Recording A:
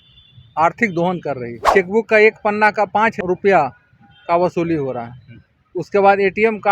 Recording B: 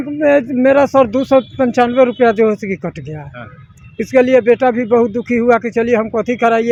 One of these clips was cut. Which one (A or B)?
A